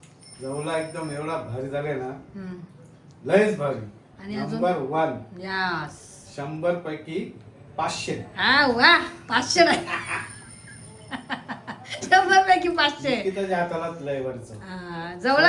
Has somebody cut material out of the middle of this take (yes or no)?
no